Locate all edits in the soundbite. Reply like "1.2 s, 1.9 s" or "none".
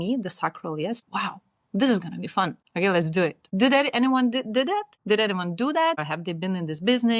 1.0 s, 2.6 s, 3.4 s, 4.9 s, 6.1 s